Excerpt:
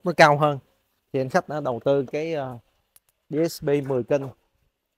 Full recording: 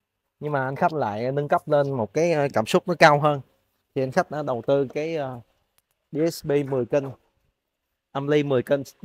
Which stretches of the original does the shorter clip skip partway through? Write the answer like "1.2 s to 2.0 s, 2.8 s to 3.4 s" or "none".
none